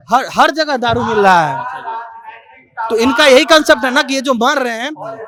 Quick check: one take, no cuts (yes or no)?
yes